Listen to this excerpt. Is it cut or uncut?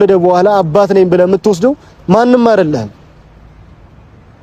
uncut